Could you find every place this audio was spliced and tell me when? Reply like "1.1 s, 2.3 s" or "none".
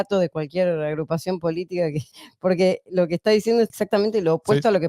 2.1 s, 3.7 s